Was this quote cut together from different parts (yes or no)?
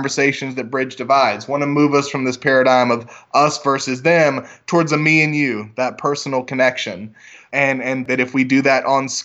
yes